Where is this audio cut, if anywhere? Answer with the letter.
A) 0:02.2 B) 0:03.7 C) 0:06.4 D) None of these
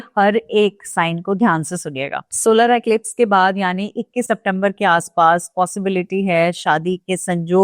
A